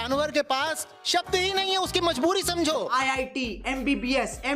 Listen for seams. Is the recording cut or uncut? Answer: cut